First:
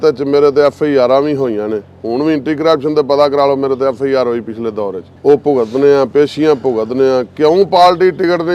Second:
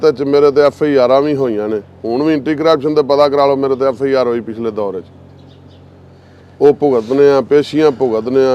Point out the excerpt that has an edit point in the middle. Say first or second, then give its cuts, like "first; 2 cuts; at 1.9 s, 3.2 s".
first; 1 cut; at 5.1 s